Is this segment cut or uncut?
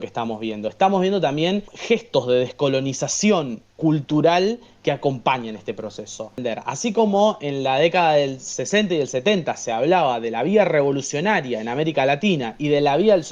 cut